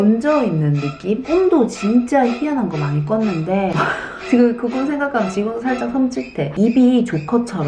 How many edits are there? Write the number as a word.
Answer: zero